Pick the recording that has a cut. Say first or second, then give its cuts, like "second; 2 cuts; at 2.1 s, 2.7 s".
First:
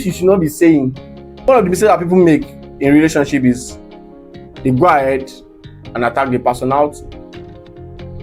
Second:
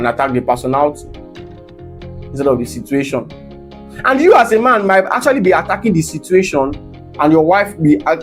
first; 1 cut; at 1.4 s